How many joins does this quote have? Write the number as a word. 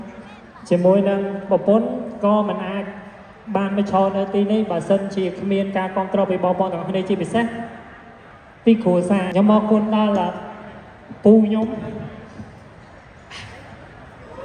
one